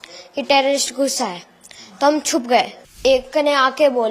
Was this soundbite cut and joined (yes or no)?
yes